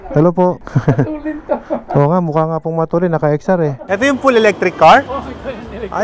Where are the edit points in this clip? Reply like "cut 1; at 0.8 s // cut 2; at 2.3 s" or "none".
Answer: cut 1; at 3.8 s